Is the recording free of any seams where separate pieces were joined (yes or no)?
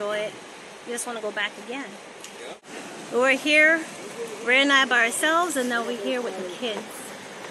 no